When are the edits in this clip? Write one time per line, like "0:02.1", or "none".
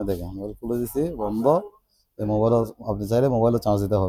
none

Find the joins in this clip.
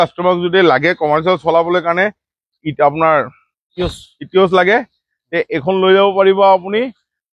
none

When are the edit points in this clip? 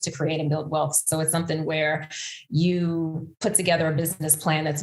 none

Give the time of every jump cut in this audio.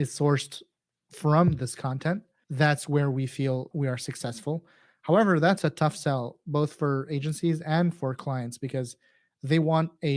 0:02.4
0:03.7

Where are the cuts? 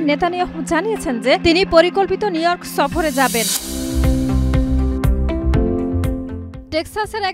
0:03.5

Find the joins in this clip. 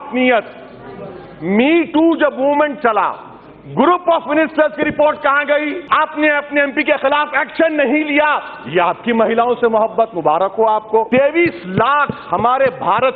0:05.8
0:11.1

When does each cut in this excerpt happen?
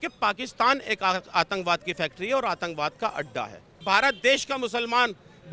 0:03.8

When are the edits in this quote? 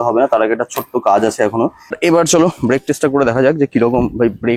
0:01.9

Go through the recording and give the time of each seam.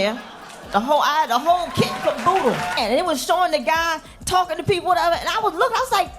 0:02.7

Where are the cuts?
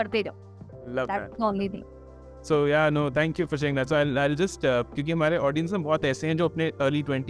none

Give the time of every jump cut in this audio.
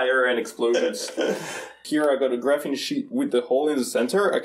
0:01.8

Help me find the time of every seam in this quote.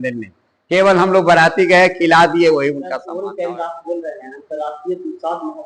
0:03.0

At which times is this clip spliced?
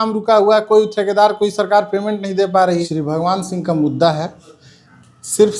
0:02.9

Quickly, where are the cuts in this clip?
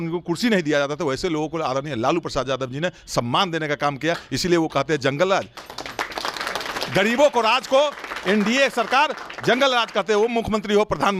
none

